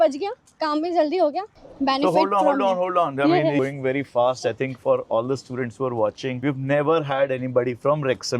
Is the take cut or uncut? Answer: cut